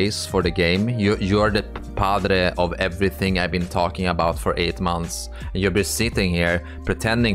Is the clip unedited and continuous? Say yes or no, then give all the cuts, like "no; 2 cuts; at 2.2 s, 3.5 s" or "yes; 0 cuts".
yes; 0 cuts